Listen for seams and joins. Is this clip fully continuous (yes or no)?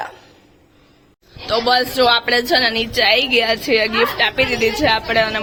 yes